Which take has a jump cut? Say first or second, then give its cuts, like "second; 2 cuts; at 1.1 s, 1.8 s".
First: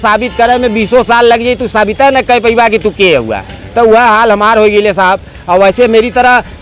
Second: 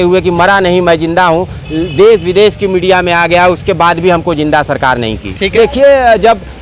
second; 1 cut; at 5.5 s